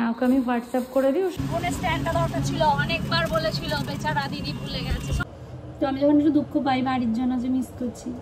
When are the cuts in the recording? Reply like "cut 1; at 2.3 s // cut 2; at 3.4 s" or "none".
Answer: cut 1; at 1.3 s // cut 2; at 5.2 s